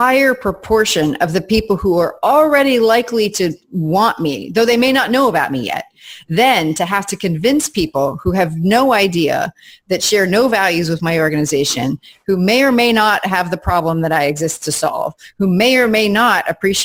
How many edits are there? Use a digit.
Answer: 0